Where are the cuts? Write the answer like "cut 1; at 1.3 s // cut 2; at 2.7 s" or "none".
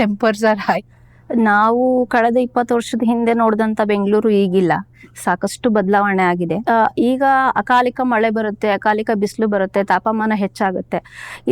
cut 1; at 0.8 s // cut 2; at 6.6 s